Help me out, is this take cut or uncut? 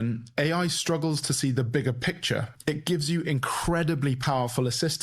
cut